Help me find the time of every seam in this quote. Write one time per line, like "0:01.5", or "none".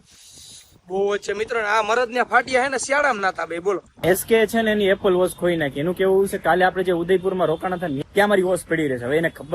0:03.9
0:08.0